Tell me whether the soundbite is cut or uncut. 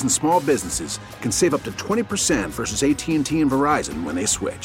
uncut